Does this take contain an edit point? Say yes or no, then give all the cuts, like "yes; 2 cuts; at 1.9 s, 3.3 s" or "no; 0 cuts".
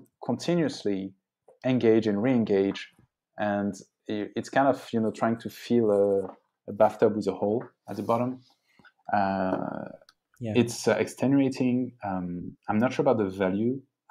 no; 0 cuts